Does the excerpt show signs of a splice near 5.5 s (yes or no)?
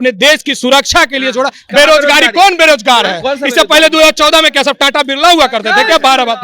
no